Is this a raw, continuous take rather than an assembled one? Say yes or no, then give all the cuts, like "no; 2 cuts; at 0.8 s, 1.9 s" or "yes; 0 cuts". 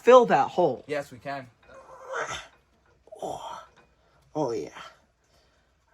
no; 1 cut; at 1.5 s